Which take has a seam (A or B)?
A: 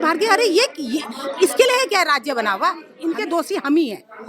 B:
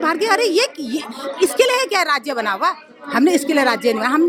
A